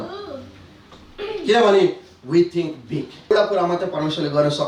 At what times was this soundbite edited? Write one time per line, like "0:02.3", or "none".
0:03.3